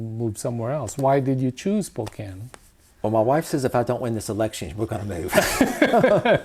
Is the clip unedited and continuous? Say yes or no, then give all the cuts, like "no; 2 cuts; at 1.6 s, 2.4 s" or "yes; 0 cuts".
yes; 0 cuts